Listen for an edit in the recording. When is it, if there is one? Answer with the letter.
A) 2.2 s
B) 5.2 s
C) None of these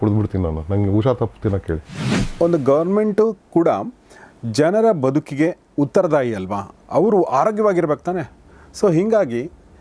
A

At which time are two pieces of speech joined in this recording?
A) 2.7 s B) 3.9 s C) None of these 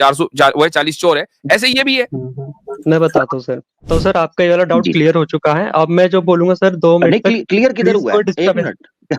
B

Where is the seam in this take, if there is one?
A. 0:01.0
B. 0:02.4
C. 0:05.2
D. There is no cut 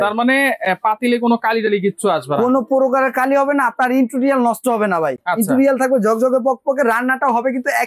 D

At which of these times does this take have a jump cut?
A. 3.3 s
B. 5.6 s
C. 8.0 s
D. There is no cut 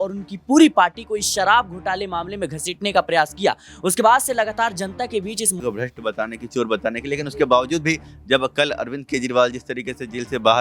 B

